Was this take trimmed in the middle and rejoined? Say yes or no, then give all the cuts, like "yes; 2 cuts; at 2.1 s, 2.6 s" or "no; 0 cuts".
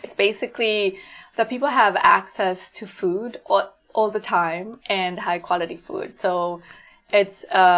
no; 0 cuts